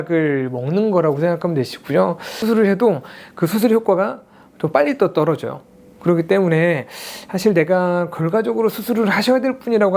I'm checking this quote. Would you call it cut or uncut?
cut